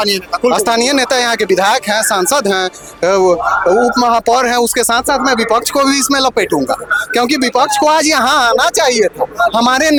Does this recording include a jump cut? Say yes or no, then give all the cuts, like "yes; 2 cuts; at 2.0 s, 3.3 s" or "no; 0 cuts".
no; 0 cuts